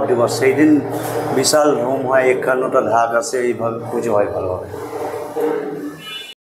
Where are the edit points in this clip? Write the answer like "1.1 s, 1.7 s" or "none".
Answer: none